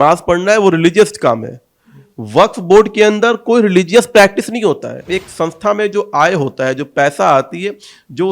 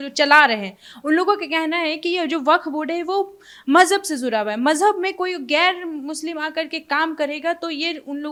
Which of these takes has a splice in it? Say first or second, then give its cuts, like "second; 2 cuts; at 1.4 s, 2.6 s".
first; 1 cut; at 5.1 s